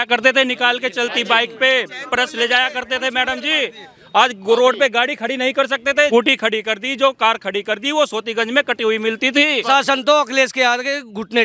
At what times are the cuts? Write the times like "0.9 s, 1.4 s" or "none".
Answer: 6.1 s, 9.6 s